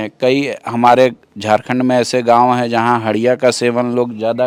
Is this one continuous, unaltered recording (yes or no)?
yes